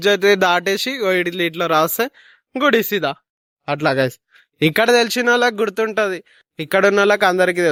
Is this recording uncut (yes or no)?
yes